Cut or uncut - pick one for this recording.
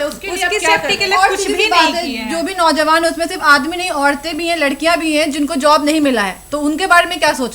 uncut